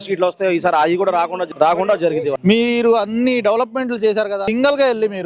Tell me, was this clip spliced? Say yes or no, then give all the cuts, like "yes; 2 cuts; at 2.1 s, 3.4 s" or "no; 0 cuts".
yes; 3 cuts; at 1.4 s, 2.4 s, 4.5 s